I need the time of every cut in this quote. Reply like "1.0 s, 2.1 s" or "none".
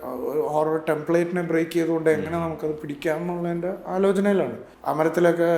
4.7 s